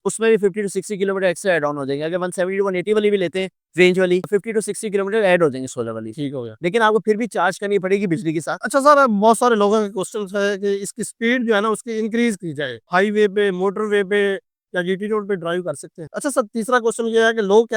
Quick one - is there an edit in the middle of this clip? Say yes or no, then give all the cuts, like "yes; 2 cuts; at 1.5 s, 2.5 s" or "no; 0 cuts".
yes; 3 cuts; at 8.5 s, 12.8 s, 16.0 s